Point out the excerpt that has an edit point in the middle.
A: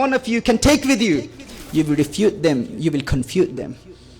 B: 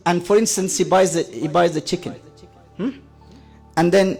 A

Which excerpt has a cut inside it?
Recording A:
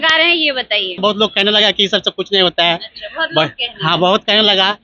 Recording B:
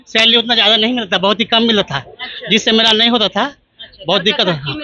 A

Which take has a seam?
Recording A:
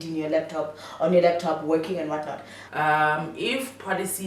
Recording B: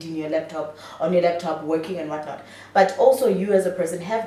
A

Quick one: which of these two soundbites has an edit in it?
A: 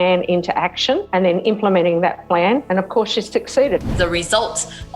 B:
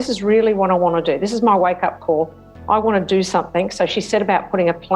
A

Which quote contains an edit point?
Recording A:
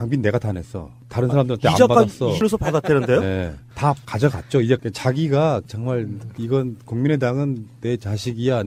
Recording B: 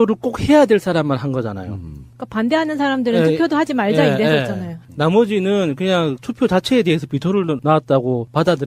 B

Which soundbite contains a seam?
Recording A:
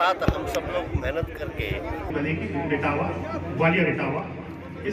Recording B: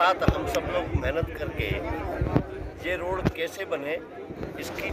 A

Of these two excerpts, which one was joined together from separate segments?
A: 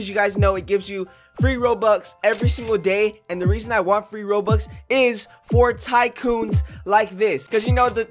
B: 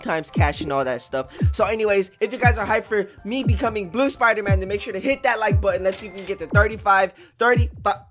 A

